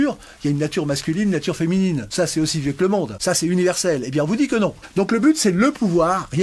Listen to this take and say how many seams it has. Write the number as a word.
three